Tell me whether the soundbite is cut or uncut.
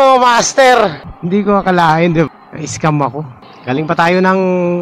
cut